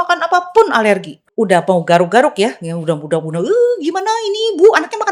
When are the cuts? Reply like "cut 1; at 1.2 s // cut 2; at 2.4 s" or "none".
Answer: cut 1; at 1.2 s